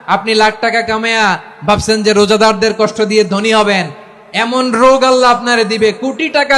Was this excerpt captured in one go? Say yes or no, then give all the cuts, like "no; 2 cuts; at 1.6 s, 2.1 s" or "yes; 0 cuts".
yes; 0 cuts